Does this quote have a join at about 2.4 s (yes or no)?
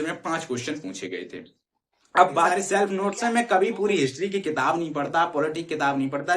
yes